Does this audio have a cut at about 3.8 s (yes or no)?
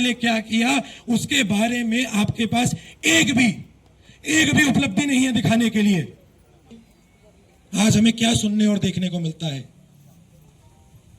no